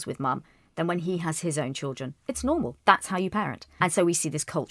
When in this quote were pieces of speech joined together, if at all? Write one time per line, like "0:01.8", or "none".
0:03.8